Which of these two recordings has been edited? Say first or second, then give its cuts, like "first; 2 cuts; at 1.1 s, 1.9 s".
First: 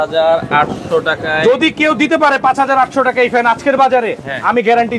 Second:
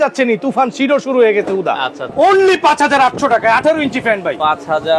second; 1 cut; at 2.0 s